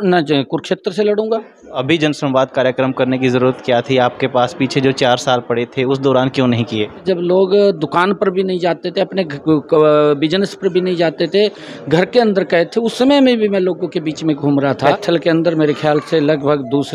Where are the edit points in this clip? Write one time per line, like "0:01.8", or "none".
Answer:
0:01.8
0:07.0
0:14.9